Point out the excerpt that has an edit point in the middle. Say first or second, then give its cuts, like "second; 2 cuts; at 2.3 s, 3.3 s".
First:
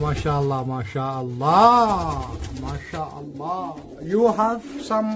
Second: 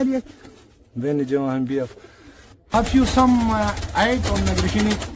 second; 1 cut; at 2.7 s